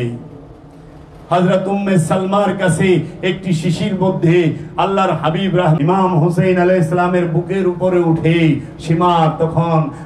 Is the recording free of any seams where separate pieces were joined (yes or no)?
no